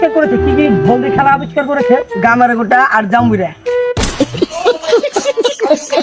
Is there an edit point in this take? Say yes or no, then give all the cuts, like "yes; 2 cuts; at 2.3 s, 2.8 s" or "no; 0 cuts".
no; 0 cuts